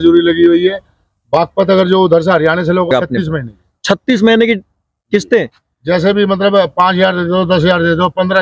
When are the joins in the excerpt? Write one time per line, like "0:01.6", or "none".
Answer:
0:02.9